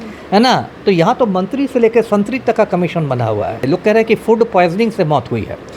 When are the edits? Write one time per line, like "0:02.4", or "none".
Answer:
0:03.6